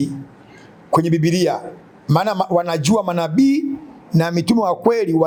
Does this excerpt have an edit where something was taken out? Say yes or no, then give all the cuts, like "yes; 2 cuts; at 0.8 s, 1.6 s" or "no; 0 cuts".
no; 0 cuts